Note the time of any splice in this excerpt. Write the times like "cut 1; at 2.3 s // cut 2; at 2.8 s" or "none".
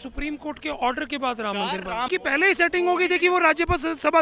cut 1; at 2.1 s